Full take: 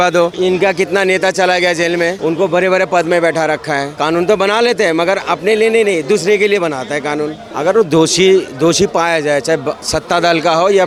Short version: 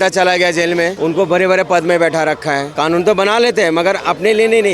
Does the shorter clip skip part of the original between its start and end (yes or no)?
no